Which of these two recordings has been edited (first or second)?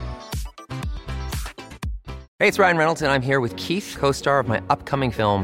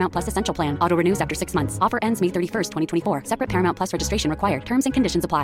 first